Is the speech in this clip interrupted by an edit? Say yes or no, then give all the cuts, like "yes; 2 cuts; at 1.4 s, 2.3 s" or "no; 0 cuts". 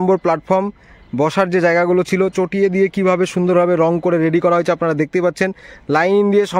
no; 0 cuts